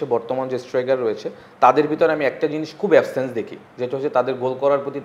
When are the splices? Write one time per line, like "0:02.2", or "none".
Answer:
none